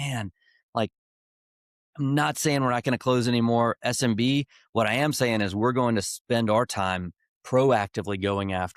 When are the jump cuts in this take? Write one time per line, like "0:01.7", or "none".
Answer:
none

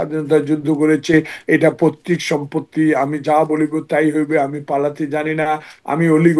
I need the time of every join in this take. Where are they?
none

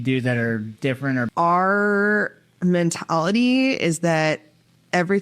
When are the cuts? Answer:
0:01.3

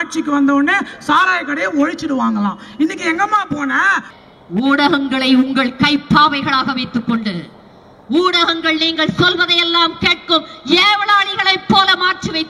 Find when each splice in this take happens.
0:04.1

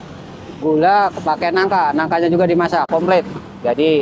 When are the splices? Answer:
0:02.9

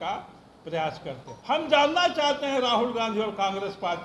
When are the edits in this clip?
0:01.3

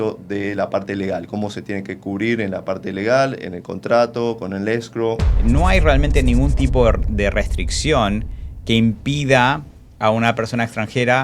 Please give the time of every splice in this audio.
0:05.3

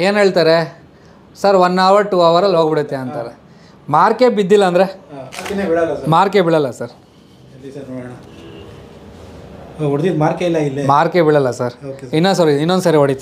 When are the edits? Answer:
none

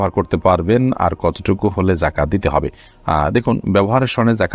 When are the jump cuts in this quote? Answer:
none

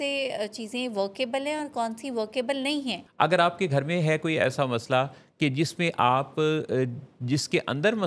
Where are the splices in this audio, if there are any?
0:03.0

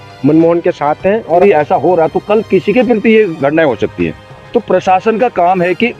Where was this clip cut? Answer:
0:01.4

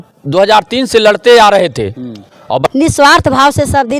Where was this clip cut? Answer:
0:02.6

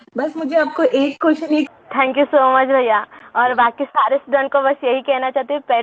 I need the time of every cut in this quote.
0:01.7

